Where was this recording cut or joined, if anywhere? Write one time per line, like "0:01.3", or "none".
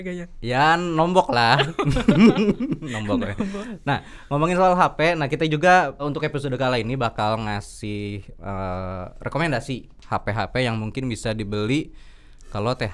0:06.1
0:09.9